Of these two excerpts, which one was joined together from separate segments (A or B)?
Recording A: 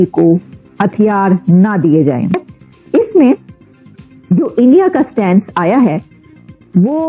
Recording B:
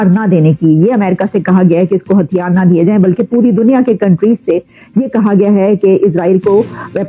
A